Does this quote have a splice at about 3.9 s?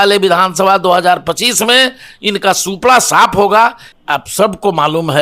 yes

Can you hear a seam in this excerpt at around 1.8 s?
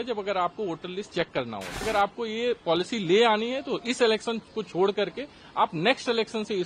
yes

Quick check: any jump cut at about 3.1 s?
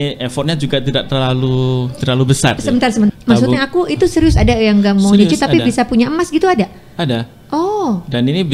yes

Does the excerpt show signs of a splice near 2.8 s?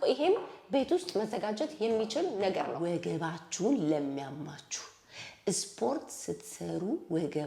yes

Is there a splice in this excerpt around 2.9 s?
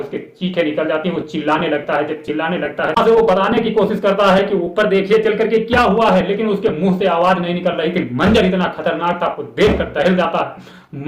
yes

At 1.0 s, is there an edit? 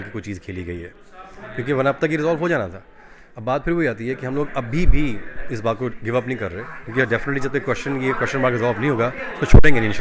no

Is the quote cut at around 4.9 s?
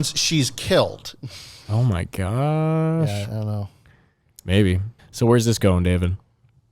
yes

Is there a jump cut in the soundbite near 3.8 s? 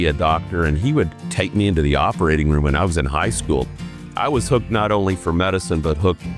no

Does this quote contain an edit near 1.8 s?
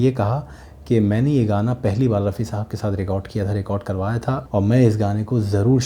no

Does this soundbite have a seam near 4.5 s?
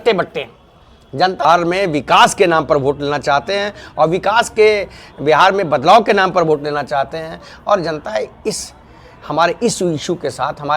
no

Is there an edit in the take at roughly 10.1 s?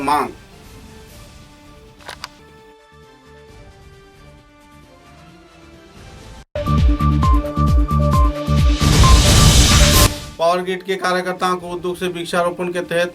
yes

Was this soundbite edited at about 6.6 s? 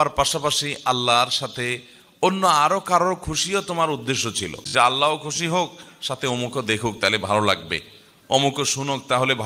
no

